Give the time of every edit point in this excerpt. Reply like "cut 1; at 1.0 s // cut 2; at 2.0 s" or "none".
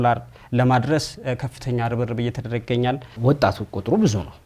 cut 1; at 3.2 s